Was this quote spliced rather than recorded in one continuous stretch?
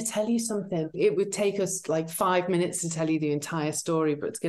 yes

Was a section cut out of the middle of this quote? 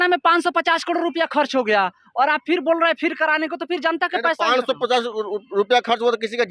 no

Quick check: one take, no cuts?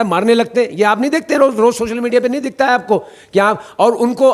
yes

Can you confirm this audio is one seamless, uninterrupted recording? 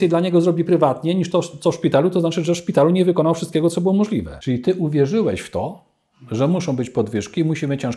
no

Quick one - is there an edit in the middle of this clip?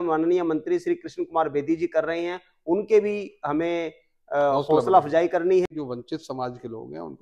yes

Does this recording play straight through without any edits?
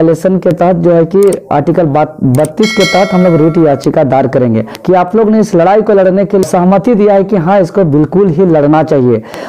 no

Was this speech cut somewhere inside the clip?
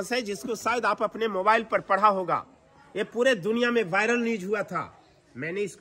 no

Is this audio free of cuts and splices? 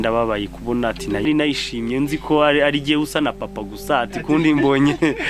yes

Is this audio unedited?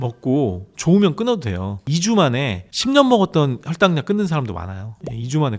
no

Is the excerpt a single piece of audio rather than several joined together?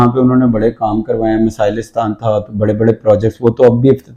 yes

